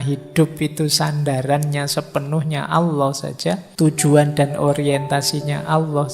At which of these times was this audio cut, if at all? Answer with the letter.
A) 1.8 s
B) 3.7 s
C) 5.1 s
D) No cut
B